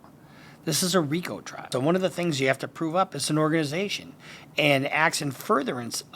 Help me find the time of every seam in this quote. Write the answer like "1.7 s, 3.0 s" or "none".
1.7 s